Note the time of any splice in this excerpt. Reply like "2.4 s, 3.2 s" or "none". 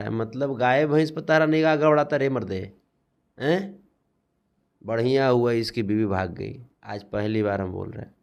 none